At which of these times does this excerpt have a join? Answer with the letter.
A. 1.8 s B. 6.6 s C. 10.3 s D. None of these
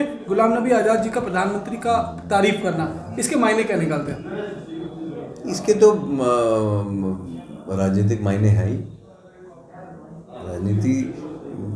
D